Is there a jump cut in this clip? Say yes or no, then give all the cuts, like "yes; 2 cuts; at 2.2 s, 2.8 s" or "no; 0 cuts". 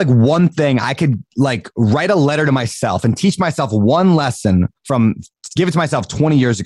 no; 0 cuts